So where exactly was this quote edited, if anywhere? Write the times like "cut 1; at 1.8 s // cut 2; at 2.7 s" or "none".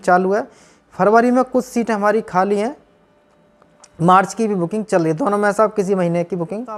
none